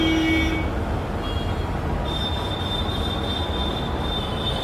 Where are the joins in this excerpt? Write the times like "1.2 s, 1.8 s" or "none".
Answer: none